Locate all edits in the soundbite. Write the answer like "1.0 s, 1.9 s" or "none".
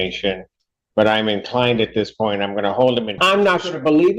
3.2 s